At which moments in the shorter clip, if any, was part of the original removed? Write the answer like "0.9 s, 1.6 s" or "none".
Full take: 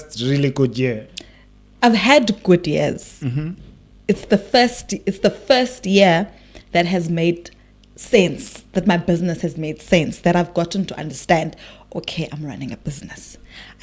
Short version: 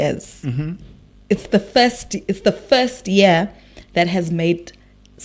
none